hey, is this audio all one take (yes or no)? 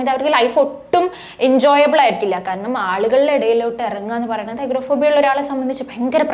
yes